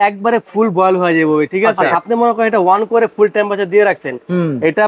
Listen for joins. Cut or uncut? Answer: cut